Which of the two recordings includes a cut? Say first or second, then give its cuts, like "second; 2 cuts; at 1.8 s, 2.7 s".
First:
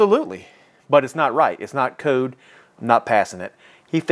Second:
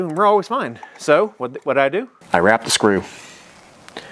second; 1 cut; at 2.2 s